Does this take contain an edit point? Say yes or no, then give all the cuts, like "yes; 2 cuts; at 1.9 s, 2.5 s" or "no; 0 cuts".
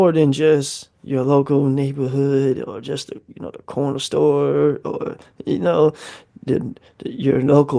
no; 0 cuts